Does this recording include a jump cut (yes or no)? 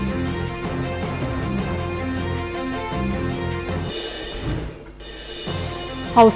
no